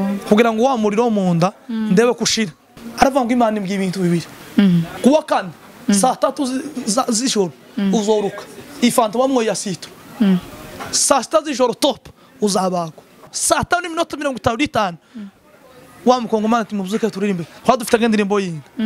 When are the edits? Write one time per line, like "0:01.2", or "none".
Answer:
0:02.8
0:04.9
0:13.3

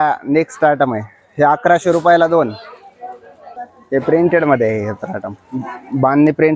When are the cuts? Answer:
0:03.5

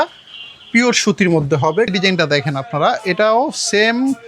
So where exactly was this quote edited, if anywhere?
0:01.9

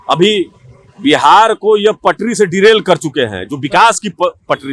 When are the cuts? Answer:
none

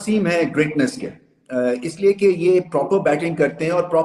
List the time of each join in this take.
none

